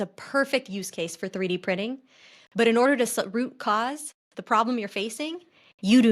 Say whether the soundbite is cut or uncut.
uncut